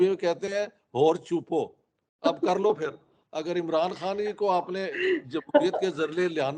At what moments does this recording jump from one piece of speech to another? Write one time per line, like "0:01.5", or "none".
none